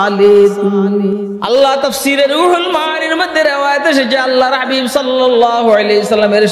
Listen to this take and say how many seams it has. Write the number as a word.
one